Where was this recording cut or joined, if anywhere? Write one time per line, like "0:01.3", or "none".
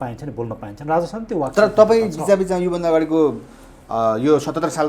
none

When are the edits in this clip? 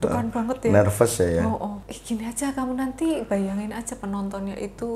0:01.9

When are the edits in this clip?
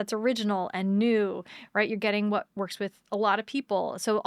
0:02.5

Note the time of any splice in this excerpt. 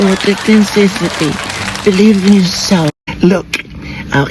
0:03.0

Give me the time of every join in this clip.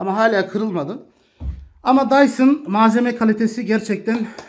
none

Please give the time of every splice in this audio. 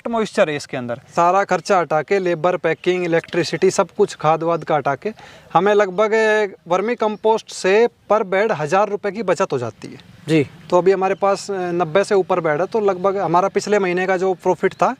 0:01.1

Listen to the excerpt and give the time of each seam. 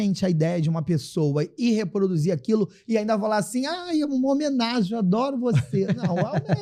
none

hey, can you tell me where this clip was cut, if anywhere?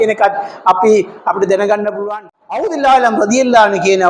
0:02.1

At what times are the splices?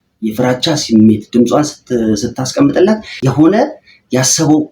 0:03.1

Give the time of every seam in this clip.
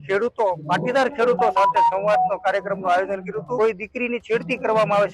0:03.5

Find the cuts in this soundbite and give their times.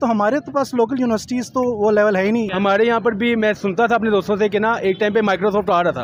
0:02.5

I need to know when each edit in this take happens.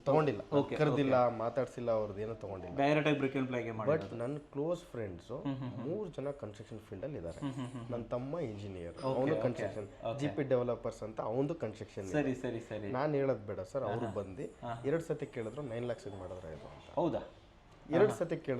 none

